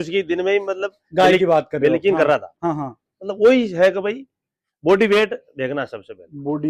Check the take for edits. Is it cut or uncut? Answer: uncut